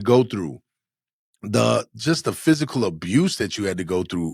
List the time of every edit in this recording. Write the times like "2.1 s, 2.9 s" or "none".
1.9 s